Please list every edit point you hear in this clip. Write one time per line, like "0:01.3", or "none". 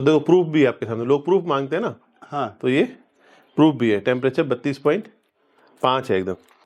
none

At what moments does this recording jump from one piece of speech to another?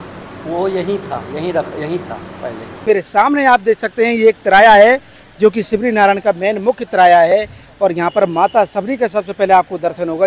0:02.8

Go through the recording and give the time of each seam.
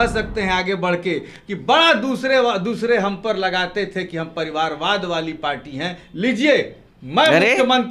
none

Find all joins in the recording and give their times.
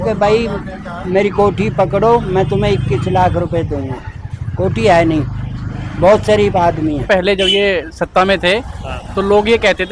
0:07.1

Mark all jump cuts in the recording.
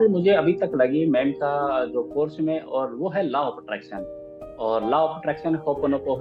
none

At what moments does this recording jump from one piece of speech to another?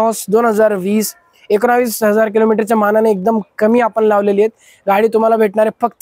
none

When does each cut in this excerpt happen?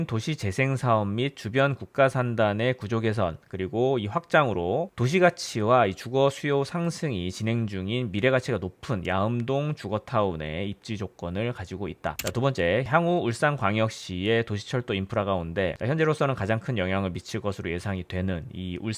none

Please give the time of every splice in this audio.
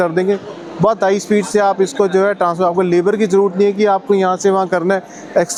none

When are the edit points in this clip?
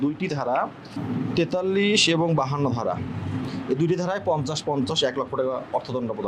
none

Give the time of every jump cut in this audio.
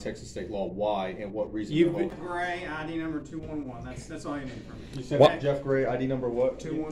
0:02.2

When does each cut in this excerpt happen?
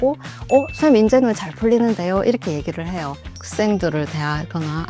0:03.3

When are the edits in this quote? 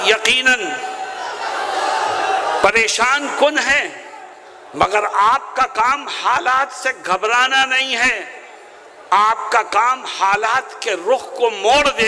none

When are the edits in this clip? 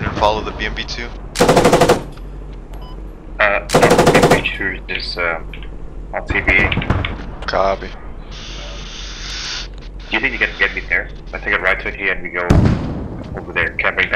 none

